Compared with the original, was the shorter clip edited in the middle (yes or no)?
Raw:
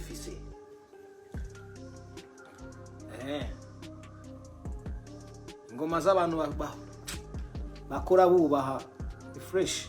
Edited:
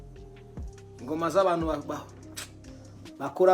yes